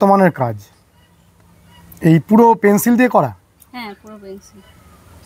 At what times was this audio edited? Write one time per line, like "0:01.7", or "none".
none